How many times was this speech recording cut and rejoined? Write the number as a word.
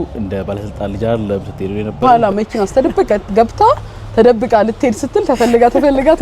one